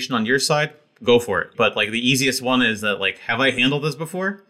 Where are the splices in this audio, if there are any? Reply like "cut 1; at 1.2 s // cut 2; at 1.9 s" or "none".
cut 1; at 1.5 s